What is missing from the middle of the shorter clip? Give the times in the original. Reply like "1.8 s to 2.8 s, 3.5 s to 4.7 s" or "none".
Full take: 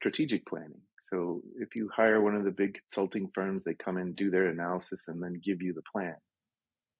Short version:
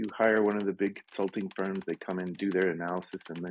none